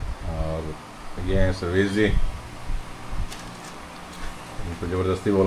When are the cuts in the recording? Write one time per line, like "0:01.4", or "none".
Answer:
none